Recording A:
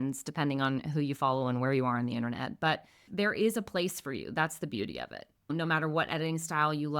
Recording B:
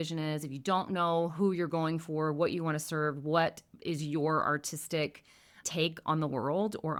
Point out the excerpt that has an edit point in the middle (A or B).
A